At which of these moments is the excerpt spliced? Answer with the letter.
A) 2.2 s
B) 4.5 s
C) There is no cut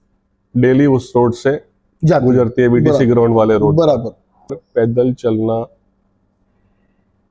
B